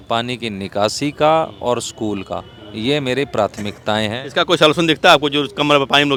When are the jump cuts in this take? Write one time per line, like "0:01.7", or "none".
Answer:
none